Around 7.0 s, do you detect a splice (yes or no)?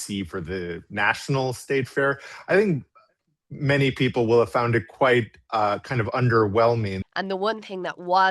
yes